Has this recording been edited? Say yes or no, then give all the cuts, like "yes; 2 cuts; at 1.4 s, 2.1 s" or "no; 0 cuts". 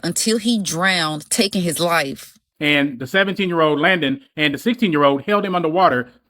yes; 1 cut; at 2.4 s